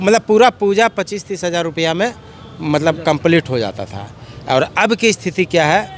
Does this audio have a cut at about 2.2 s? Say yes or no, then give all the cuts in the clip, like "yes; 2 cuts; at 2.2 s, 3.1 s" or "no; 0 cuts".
no; 0 cuts